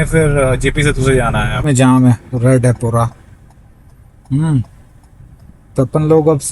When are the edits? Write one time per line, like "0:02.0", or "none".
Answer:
0:01.6